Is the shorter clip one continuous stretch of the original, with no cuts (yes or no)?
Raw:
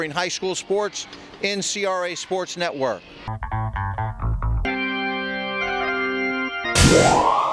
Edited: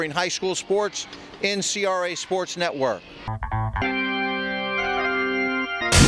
no